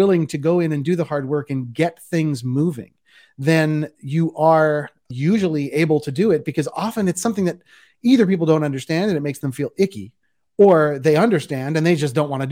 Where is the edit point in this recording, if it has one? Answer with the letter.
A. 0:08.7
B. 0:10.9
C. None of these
C